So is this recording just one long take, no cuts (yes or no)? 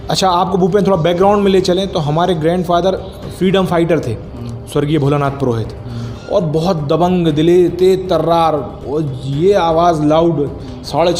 yes